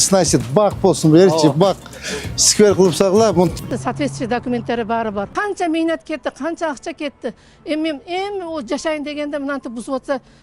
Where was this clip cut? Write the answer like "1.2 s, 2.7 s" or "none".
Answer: 3.7 s